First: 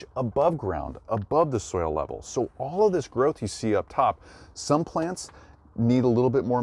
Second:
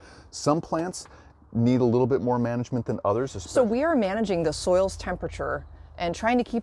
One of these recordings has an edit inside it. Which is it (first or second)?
second